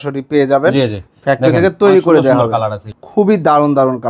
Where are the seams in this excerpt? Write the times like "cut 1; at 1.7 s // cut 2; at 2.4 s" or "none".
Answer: cut 1; at 2.9 s